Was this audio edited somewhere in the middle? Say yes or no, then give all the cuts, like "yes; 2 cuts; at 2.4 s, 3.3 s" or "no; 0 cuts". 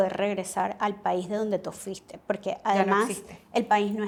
no; 0 cuts